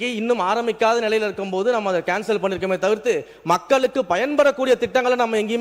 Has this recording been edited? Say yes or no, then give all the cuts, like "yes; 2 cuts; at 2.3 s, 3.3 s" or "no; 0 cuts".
no; 0 cuts